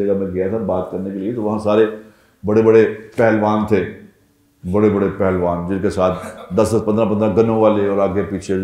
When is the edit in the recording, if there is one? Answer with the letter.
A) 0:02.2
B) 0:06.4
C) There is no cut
C